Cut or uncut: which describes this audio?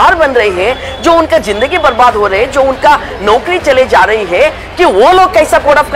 uncut